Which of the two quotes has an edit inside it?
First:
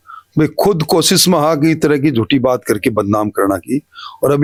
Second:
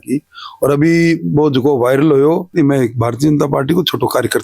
second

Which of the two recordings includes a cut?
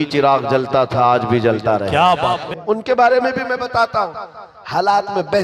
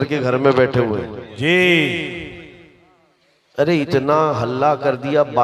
first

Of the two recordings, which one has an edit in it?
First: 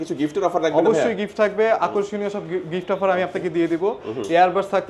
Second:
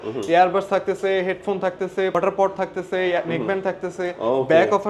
second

